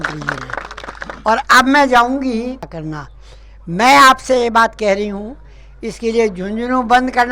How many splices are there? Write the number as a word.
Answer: one